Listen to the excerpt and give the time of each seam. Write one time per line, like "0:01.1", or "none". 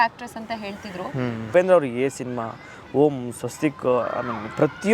0:01.4